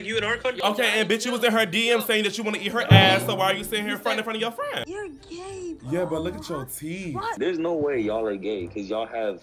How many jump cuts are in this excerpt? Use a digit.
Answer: 2